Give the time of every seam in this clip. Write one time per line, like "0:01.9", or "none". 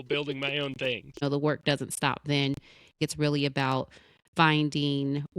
0:01.2
0:03.0